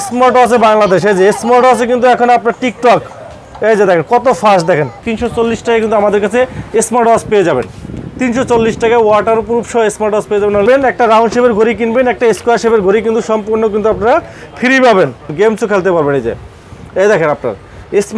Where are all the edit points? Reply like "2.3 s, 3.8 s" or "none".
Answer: 5.0 s, 10.7 s, 15.3 s